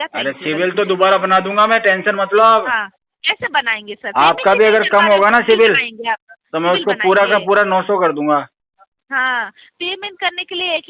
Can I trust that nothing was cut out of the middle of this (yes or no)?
yes